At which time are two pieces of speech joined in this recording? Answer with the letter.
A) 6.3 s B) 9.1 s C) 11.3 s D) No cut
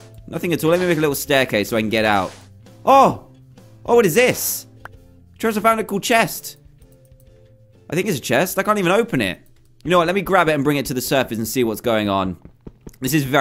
D